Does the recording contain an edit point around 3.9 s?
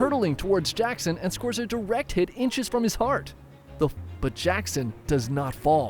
yes; 1 cut; at 3.9 s

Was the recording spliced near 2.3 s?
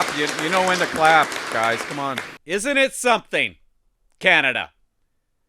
yes; 1 cut; at 2.3 s

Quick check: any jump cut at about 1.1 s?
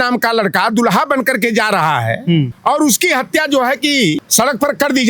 no; 2 cuts; at 2.5 s, 4.3 s

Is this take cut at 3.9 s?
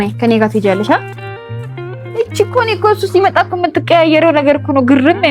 no; 0 cuts

